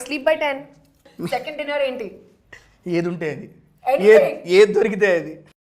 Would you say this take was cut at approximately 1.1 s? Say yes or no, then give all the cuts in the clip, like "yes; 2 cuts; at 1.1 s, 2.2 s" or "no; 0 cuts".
yes; 1 cut; at 1.1 s